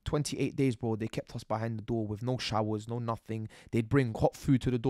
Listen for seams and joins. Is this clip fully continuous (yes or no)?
yes